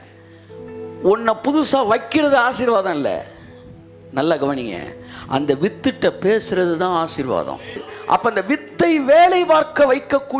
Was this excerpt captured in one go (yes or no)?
no